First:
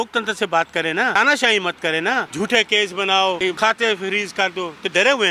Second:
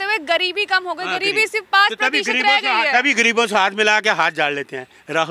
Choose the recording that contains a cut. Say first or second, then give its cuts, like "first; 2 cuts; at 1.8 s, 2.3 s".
first; 3 cuts; at 1.2 s, 2.3 s, 3.5 s